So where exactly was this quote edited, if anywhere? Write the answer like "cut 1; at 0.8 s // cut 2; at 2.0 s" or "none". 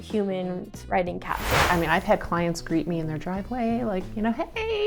cut 1; at 1.7 s